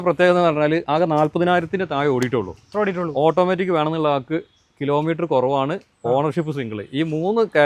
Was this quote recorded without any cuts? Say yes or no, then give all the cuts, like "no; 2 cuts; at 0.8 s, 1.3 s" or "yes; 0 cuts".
yes; 0 cuts